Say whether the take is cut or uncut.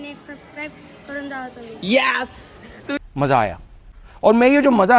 uncut